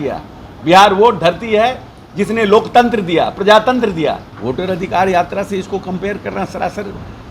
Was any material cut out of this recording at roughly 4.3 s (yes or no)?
yes